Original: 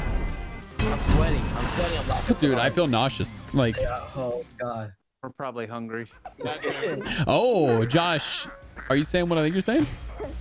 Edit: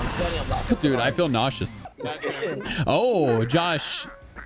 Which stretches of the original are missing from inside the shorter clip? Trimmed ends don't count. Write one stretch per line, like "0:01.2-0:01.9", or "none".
0:03.3-0:06.1